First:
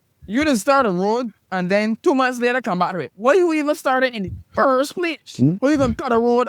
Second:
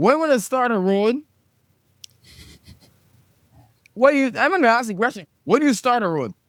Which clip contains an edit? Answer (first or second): first